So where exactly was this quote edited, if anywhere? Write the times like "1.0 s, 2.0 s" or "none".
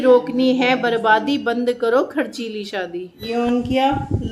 3.2 s